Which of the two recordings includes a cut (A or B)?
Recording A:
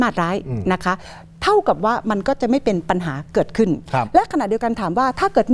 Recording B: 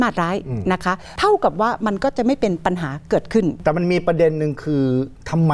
B